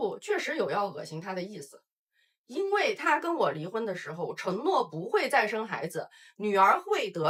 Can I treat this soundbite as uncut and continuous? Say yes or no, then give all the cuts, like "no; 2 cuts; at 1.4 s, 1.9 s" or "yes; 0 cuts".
yes; 0 cuts